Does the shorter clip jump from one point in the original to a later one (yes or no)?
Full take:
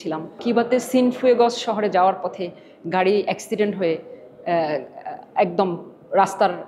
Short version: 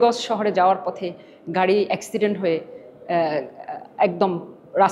no